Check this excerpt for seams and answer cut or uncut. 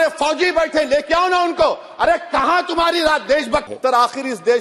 cut